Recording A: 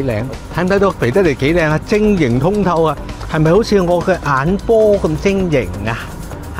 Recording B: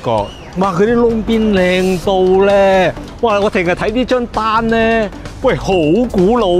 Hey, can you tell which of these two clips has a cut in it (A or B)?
B